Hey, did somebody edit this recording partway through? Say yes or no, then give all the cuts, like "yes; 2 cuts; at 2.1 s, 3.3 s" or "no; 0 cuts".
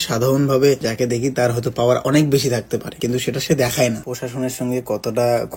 yes; 1 cut; at 4.1 s